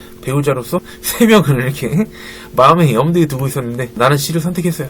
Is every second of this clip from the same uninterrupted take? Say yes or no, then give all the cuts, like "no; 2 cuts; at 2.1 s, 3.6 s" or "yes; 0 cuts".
no; 2 cuts; at 1.0 s, 3.9 s